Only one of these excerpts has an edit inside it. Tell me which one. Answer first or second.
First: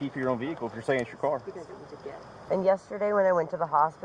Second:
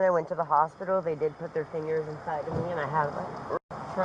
first